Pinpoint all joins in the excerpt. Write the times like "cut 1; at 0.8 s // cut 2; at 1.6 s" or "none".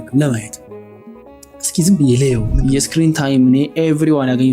cut 1; at 2.5 s